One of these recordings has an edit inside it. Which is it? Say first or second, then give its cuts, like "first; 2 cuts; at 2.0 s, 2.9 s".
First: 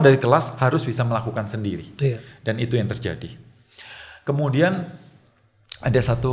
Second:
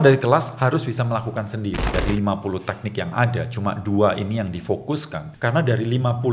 second; 2 cuts; at 1.9 s, 5.2 s